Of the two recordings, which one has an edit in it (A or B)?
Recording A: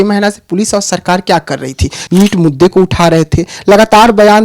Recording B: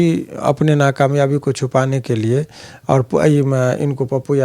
A